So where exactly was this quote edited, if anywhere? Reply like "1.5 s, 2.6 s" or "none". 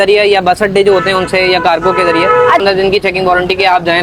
2.6 s